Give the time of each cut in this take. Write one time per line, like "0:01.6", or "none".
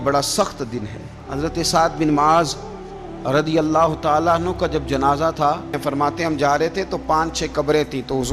0:01.2
0:05.8